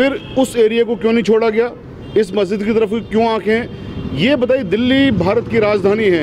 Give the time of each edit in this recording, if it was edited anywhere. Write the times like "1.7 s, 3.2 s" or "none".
none